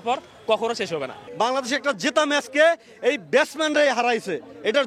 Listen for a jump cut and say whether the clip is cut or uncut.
uncut